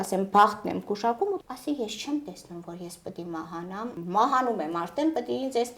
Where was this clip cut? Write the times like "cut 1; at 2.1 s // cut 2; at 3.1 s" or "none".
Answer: cut 1; at 1.4 s // cut 2; at 4.0 s